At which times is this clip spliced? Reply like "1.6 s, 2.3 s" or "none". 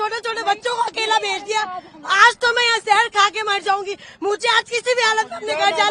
none